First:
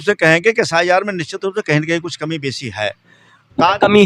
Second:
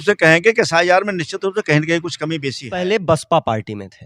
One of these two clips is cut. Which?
second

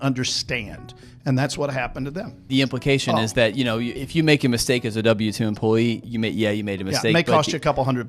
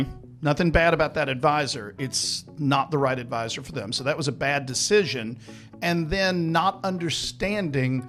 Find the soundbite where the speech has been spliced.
first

